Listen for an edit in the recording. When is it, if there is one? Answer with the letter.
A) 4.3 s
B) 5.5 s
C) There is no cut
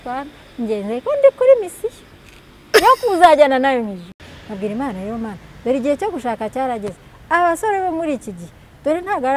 A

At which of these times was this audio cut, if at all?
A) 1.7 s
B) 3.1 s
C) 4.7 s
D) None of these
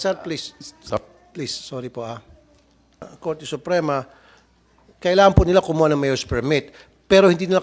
B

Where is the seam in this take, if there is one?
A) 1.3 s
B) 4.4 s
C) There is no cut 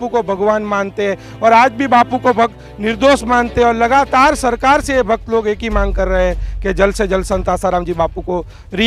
C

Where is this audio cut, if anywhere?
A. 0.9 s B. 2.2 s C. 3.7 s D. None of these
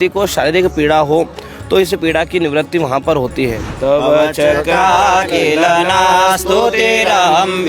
C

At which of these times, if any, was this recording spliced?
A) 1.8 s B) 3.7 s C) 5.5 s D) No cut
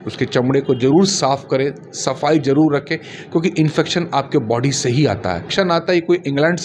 C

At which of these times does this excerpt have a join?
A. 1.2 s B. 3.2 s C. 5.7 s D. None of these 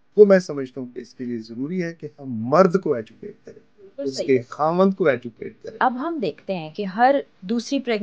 C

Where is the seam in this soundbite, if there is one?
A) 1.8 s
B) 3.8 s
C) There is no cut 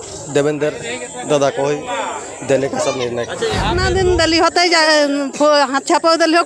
B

